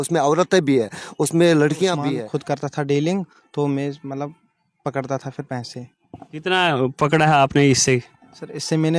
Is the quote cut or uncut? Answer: cut